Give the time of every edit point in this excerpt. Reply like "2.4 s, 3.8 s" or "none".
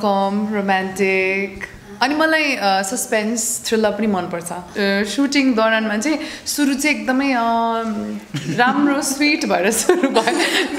4.6 s